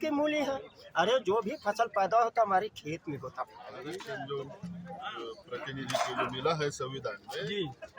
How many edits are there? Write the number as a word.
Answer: one